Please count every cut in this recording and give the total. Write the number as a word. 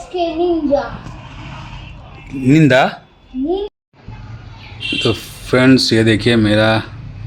one